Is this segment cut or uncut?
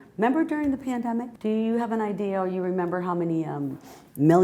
cut